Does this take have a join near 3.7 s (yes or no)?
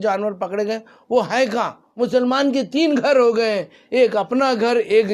no